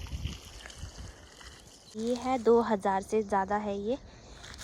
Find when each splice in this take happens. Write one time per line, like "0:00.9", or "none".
0:02.0